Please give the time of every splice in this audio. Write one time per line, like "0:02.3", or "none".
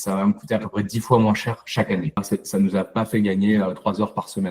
0:02.2